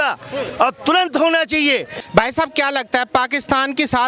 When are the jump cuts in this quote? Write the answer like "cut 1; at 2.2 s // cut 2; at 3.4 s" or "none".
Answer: cut 1; at 2.0 s